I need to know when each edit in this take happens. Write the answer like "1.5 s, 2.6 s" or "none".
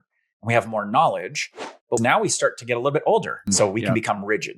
2.0 s, 3.5 s